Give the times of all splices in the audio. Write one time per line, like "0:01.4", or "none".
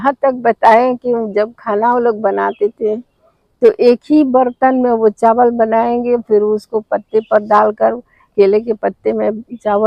none